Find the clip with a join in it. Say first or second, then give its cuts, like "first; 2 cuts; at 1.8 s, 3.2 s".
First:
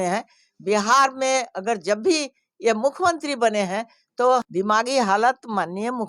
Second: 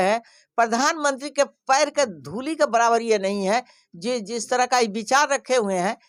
first; 1 cut; at 4.5 s